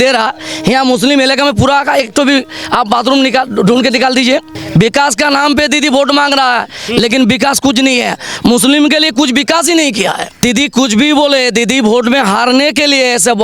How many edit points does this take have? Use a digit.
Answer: 2